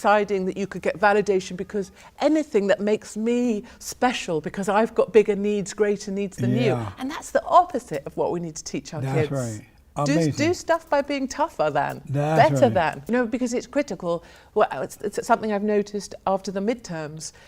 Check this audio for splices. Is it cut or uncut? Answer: cut